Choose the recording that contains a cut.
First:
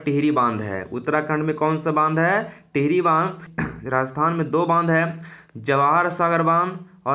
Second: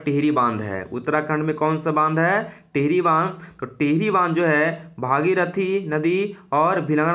first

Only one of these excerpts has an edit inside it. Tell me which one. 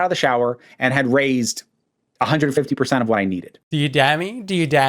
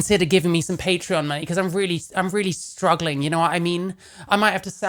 first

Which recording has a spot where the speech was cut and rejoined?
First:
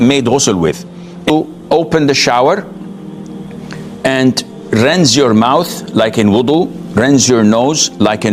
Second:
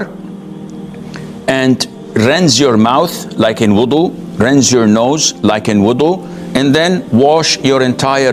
first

